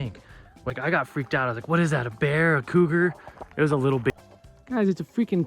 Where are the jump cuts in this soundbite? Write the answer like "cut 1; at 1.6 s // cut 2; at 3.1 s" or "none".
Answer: cut 1; at 0.7 s // cut 2; at 4.1 s